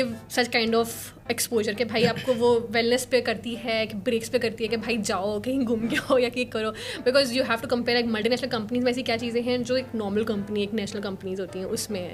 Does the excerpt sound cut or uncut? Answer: uncut